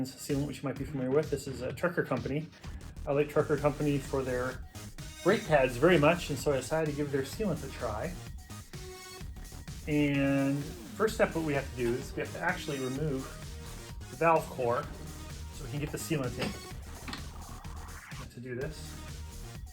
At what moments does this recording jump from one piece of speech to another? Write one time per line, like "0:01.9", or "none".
0:08.2
0:09.8